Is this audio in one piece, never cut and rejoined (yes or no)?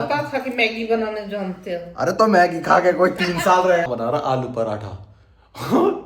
no